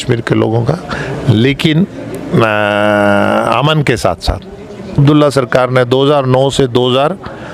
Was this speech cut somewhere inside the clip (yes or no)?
yes